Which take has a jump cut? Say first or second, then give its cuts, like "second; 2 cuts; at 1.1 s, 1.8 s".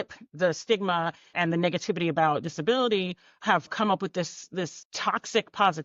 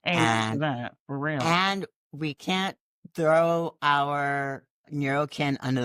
first; 3 cuts; at 1.3 s, 3.7 s, 4.8 s